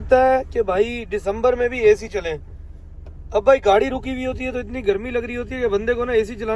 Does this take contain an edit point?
no; 0 cuts

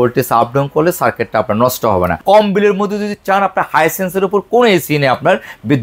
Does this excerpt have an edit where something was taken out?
yes; 1 cut; at 2.2 s

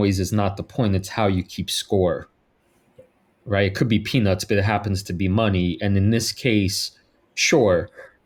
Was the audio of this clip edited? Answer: no; 0 cuts

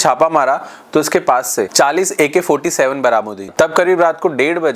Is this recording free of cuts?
no; 1 cut; at 3.5 s

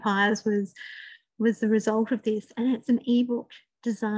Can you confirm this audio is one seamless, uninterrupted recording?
yes; 0 cuts

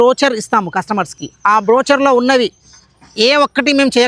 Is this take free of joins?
yes; 0 cuts

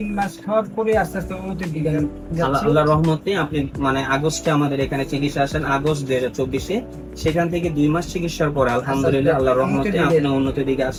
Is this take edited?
no; 0 cuts

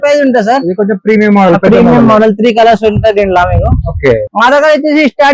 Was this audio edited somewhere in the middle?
yes; 1 cut; at 4.3 s

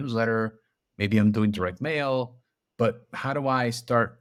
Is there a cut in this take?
no; 0 cuts

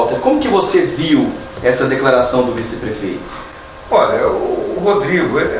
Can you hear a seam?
no; 0 cuts

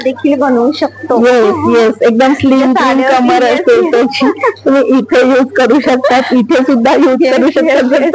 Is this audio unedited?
yes; 0 cuts

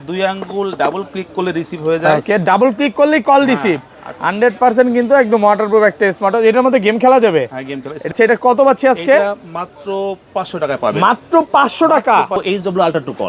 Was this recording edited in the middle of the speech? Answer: yes; 2 cuts; at 8.1 s, 12.4 s

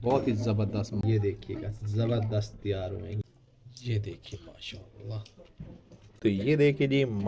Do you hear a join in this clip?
yes; 3 cuts; at 1.0 s, 3.2 s, 6.0 s

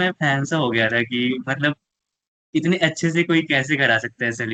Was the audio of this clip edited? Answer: no; 0 cuts

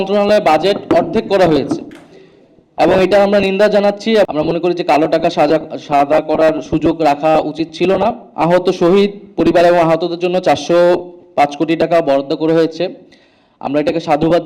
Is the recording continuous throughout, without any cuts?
no; 2 cuts; at 4.3 s, 8.3 s

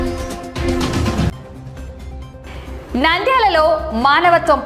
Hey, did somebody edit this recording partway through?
yes; 1 cut; at 1.3 s

